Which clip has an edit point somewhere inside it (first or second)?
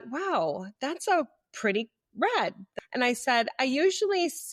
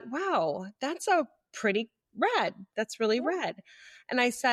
first